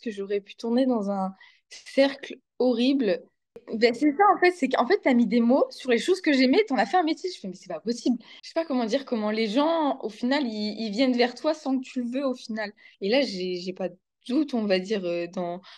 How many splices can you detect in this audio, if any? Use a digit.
3